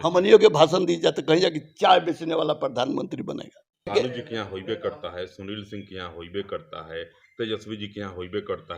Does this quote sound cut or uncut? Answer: cut